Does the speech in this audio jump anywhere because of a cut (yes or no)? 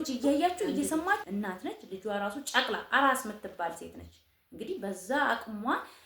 yes